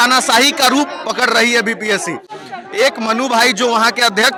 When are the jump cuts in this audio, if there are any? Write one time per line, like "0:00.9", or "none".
none